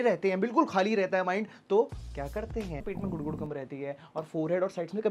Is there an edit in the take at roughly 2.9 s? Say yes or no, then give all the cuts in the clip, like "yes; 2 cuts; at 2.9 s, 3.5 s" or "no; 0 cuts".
yes; 1 cut; at 2.9 s